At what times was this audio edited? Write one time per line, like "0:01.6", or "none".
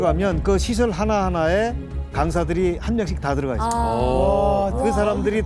none